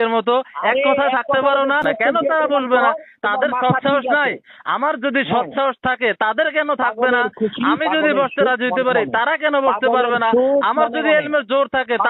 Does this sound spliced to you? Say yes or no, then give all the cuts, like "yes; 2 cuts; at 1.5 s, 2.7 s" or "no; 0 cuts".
yes; 1 cut; at 1.8 s